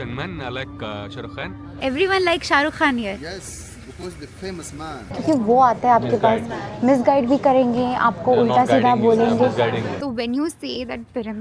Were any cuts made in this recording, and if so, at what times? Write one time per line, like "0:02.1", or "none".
0:01.7
0:05.1
0:09.9